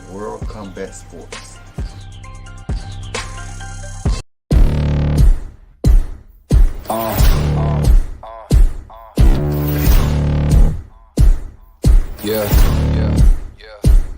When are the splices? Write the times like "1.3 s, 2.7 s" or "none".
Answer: 4.2 s